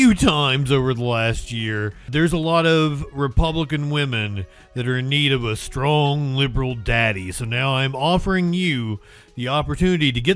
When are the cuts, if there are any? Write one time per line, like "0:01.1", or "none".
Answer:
0:02.1